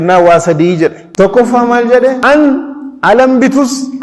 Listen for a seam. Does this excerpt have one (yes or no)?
yes